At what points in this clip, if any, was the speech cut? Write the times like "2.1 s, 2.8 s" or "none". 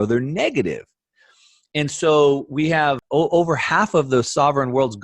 3.0 s